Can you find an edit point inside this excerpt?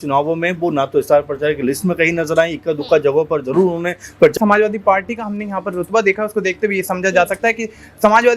yes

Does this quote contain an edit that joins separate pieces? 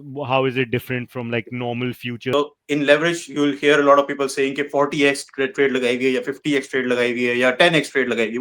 yes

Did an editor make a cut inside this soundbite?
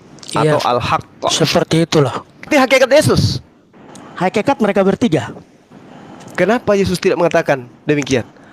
yes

